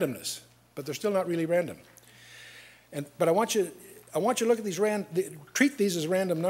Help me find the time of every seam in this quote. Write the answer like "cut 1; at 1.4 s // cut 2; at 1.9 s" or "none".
none